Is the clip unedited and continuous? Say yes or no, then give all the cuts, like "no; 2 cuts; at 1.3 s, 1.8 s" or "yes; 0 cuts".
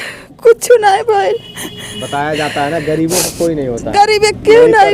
yes; 0 cuts